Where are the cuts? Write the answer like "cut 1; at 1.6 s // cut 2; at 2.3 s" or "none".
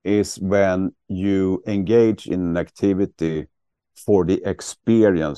none